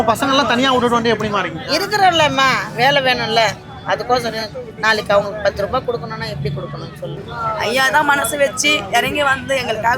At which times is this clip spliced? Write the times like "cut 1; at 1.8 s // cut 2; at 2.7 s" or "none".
cut 1; at 7.3 s

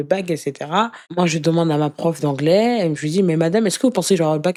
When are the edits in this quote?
none

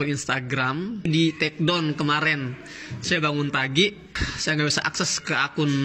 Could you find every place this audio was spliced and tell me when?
cut 1; at 1.1 s

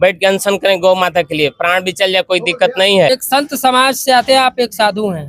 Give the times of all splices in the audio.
cut 1; at 3.1 s

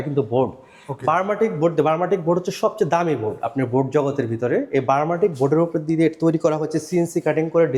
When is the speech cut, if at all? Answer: none

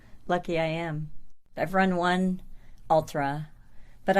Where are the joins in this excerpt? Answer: cut 1; at 1.5 s

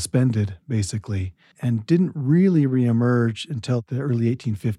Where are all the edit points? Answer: cut 1; at 3.8 s

